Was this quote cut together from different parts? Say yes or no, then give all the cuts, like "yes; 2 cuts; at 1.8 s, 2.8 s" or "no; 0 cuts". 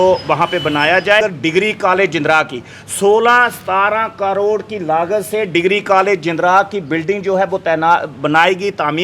yes; 1 cut; at 1.2 s